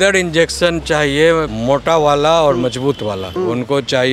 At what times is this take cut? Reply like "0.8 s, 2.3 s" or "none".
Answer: 1.5 s, 3.3 s